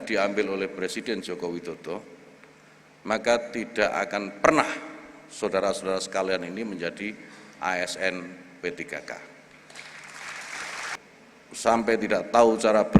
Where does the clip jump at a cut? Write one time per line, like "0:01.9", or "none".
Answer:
0:11.0